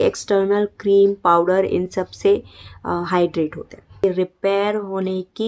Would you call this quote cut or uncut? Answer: cut